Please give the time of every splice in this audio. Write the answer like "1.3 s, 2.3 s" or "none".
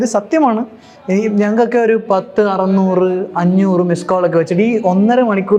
none